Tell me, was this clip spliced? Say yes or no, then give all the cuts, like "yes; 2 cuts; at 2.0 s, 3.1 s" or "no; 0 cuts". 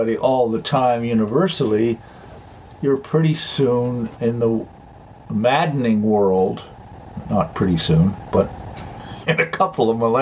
no; 0 cuts